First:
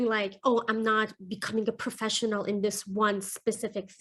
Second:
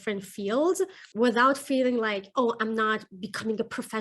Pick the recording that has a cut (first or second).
second